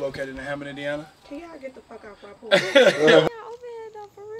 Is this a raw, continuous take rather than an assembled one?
no; 1 cut; at 3.2 s

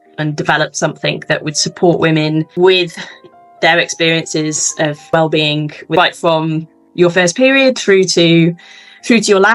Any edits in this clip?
no; 0 cuts

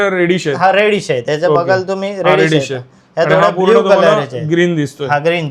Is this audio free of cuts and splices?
yes; 0 cuts

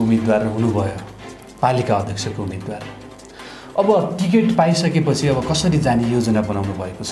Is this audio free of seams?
yes; 0 cuts

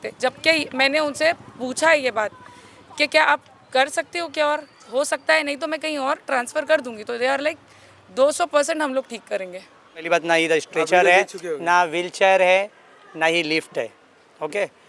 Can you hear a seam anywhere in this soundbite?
yes; 1 cut; at 10.1 s

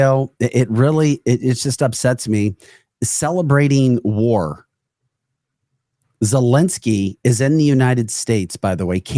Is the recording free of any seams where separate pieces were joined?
yes; 0 cuts

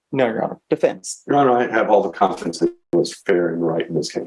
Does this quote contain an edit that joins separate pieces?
yes; 1 cut; at 2.9 s

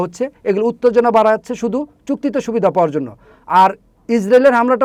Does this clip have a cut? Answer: no; 0 cuts

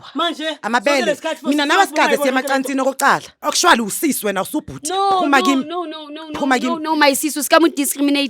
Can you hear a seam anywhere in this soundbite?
yes; 1 cut; at 3.3 s

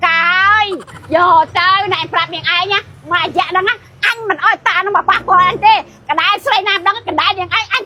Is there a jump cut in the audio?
no; 0 cuts

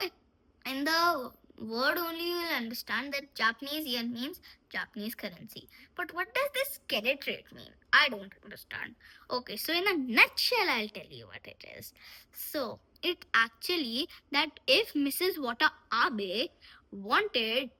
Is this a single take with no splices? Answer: yes; 0 cuts

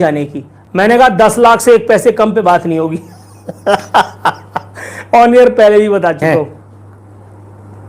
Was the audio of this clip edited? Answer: yes; 1 cut; at 6.2 s

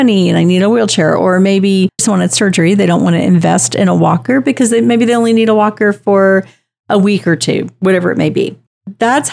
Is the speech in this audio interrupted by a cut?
yes; 1 cut; at 2.0 s

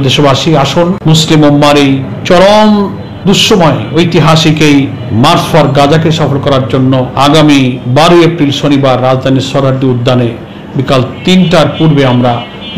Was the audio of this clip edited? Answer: yes; 5 cuts; at 1.0 s, 2.1 s, 5.0 s, 7.1 s, 7.8 s

